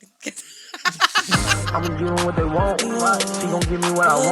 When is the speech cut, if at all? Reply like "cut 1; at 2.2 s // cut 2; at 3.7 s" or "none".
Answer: cut 1; at 1.3 s